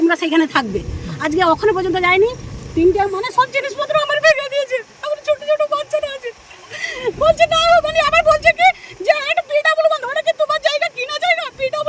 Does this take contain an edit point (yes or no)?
no